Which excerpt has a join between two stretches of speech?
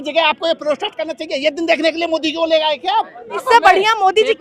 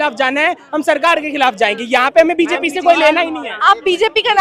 first; 1 cut; at 3.4 s

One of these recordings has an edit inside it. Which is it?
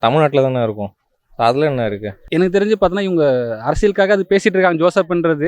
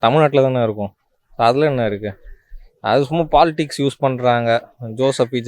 first; 1 cut; at 2.2 s

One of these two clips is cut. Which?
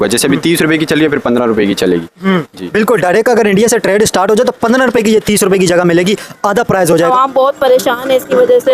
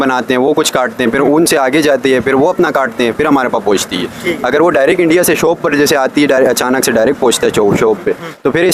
first; 1 cut; at 7.1 s

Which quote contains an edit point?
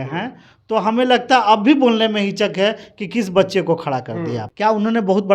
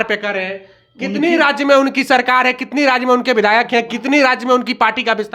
first; 1 cut; at 4.4 s

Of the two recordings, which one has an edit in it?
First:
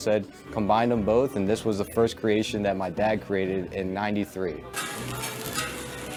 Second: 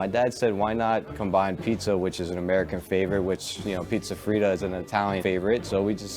second; 1 cut; at 5.2 s

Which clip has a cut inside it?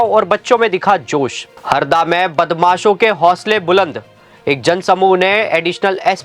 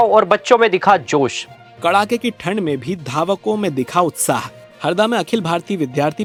first; 1 cut; at 1.5 s

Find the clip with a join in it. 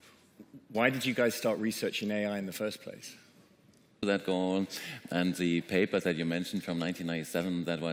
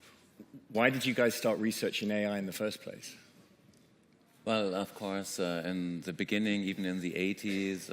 second; 1 cut; at 4.0 s

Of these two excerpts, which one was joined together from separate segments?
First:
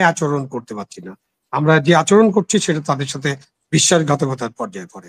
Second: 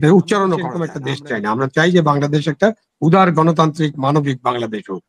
second; 1 cut; at 1.0 s

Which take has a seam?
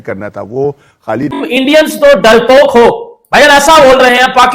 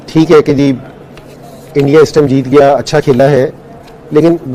first; 1 cut; at 1.4 s

